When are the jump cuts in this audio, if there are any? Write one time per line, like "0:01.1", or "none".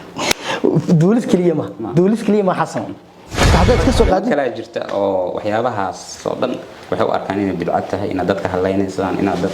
0:03.5

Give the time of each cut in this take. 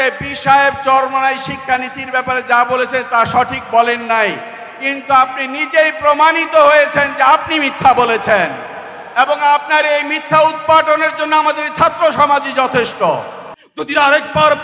0:13.6

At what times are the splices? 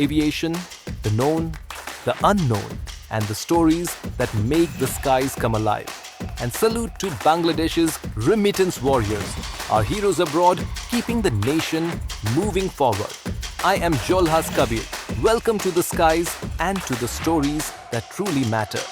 none

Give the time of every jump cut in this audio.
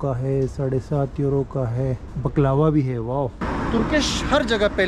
0:02.1
0:03.4

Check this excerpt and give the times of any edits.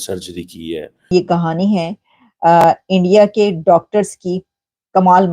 0:01.1

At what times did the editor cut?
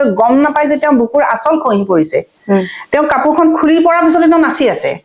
none

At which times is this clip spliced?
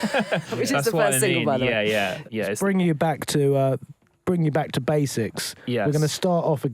0:02.2

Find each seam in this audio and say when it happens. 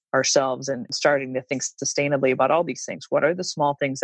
0:00.9

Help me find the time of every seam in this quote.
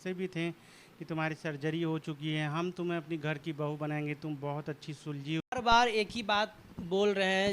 0:05.4

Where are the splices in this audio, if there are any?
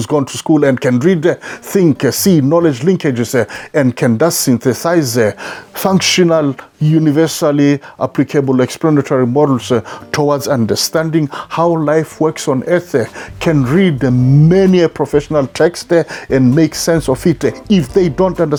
none

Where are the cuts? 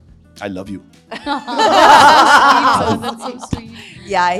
none

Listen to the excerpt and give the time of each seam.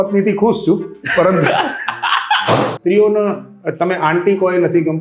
0:02.8

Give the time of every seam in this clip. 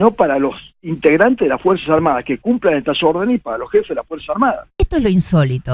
0:04.8

